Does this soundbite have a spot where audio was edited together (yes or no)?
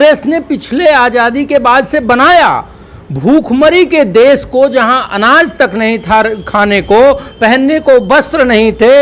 no